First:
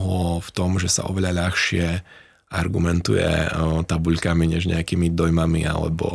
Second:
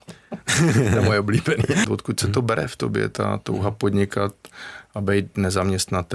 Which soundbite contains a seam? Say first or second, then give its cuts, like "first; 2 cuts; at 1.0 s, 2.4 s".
second; 1 cut; at 1.8 s